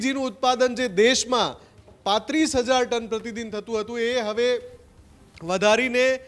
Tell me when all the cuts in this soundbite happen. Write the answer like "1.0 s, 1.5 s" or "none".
none